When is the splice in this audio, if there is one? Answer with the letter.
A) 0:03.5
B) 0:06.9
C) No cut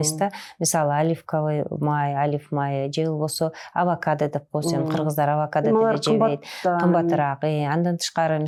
C